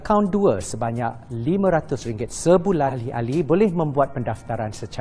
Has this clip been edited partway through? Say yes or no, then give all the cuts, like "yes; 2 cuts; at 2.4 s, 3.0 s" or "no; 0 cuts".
yes; 1 cut; at 3.0 s